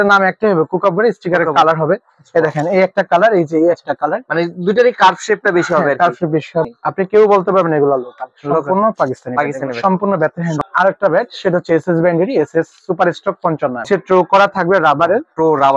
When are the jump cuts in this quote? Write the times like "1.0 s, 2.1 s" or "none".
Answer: 6.6 s, 10.6 s, 13.9 s